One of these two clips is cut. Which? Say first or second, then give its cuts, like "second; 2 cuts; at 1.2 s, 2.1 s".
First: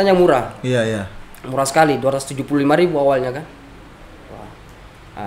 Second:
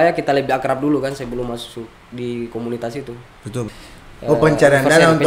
second; 1 cut; at 3.7 s